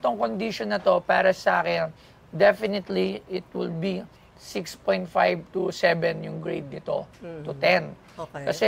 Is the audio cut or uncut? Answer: uncut